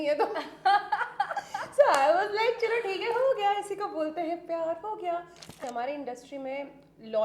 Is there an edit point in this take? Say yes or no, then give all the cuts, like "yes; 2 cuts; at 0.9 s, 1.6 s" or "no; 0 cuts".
yes; 1 cut; at 5.6 s